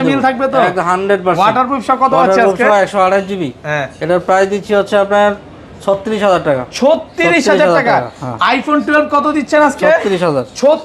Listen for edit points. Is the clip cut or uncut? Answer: uncut